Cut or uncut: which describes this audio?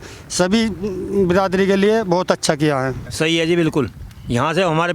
cut